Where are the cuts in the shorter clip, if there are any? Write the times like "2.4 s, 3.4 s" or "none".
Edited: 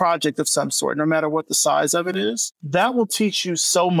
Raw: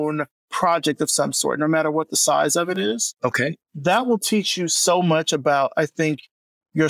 2.5 s